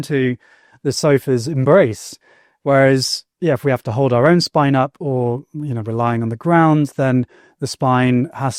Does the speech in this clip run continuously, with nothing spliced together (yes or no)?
yes